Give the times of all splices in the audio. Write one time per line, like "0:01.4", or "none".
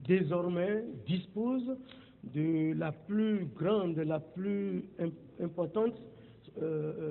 0:05.0